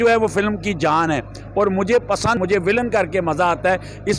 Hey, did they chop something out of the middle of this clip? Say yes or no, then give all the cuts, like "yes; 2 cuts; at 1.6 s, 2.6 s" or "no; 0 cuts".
yes; 1 cut; at 2.4 s